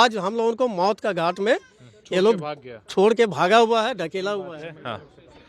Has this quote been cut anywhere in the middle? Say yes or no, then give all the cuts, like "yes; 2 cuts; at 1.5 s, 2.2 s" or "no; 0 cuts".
no; 0 cuts